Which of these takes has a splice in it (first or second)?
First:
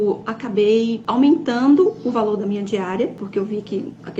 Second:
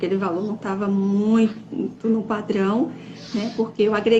first